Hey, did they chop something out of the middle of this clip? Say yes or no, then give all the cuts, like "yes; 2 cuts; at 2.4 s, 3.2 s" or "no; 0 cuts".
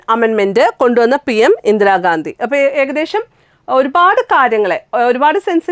no; 0 cuts